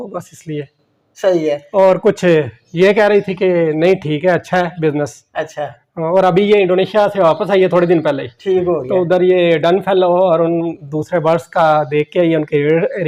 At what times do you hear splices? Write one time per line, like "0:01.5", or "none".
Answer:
none